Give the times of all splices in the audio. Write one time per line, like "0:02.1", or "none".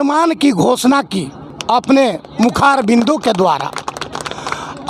none